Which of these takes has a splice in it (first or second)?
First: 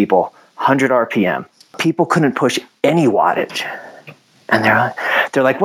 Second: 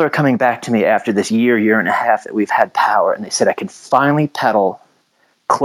first